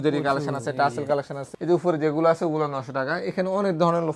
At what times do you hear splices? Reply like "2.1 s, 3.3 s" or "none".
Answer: 1.6 s